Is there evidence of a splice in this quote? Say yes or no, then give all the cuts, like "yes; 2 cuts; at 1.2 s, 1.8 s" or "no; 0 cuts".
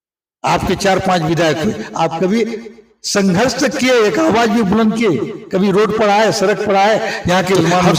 no; 0 cuts